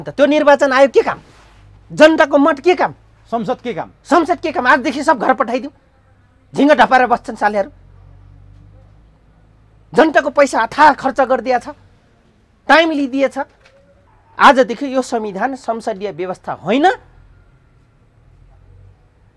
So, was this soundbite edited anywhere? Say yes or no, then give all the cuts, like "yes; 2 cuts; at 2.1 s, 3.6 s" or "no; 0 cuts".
no; 0 cuts